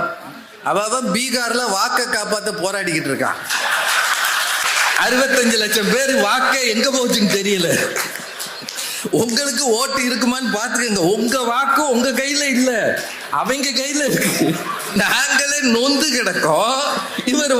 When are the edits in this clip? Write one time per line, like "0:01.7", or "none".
0:04.6
0:15.0